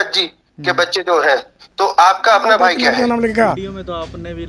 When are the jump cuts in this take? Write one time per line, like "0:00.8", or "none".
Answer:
0:03.0